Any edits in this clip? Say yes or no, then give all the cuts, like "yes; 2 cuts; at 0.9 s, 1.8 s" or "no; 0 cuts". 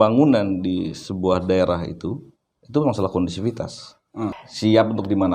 yes; 1 cut; at 4.4 s